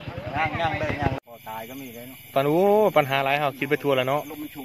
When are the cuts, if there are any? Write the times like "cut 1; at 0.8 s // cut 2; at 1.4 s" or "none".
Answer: cut 1; at 1.1 s